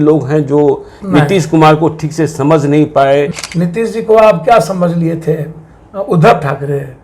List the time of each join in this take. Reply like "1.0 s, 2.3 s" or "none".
3.3 s